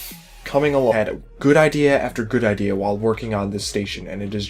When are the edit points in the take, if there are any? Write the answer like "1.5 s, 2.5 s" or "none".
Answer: none